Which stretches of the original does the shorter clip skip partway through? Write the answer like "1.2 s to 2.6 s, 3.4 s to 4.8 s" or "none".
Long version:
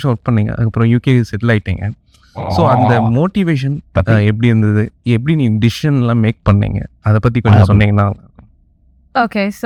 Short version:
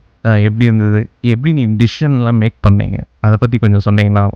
none